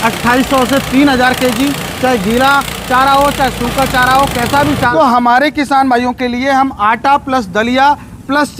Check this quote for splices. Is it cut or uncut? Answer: cut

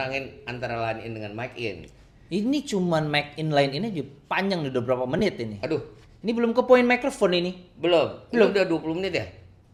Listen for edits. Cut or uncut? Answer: uncut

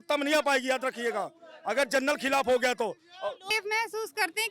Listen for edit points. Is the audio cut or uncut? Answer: cut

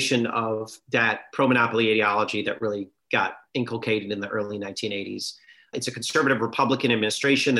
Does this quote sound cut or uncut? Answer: cut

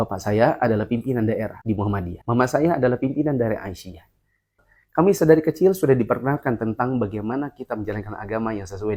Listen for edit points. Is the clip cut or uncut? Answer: uncut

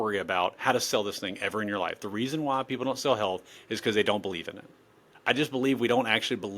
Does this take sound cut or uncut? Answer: cut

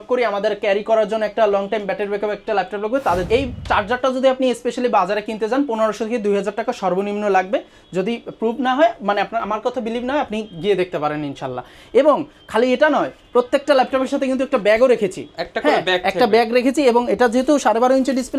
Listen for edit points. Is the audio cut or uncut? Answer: cut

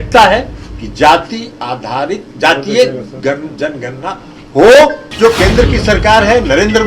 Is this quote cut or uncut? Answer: cut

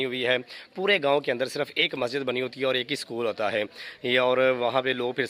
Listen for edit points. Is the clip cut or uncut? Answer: uncut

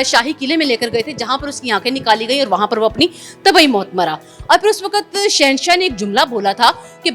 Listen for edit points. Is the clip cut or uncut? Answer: uncut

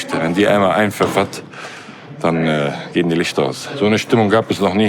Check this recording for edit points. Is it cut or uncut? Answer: cut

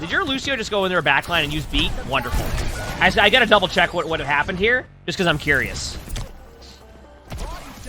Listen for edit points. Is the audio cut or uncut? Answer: uncut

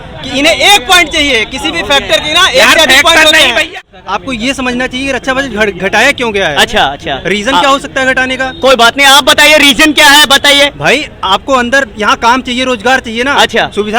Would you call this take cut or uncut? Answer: cut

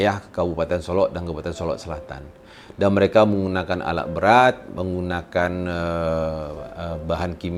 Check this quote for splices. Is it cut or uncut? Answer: uncut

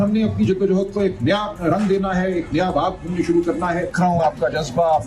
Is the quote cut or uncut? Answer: cut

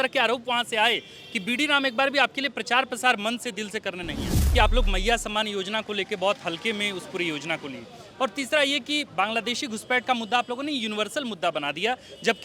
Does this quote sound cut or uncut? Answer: cut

